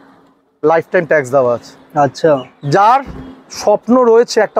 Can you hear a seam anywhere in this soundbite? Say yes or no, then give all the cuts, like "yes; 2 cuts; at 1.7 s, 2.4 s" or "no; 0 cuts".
no; 0 cuts